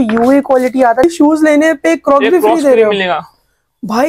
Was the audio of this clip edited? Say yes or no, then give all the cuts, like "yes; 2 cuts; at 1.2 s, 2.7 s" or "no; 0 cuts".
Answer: yes; 1 cut; at 1.0 s